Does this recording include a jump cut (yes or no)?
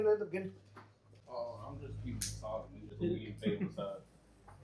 no